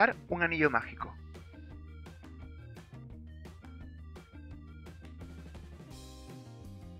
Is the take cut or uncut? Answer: uncut